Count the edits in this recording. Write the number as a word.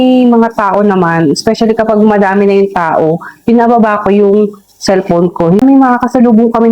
one